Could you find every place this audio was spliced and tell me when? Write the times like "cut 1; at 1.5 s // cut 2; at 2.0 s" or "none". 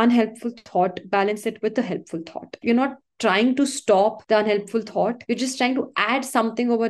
cut 1; at 2.5 s // cut 2; at 4.2 s // cut 3; at 5.2 s